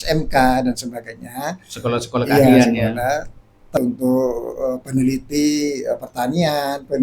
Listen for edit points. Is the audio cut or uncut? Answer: cut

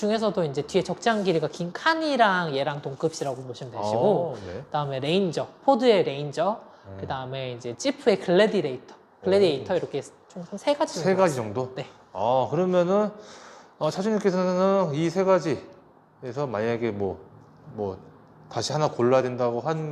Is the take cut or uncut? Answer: uncut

